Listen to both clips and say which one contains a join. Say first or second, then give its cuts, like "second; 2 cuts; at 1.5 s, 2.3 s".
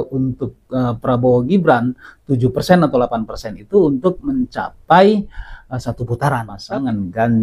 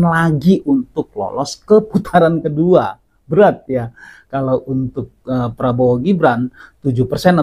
first; 1 cut; at 6.5 s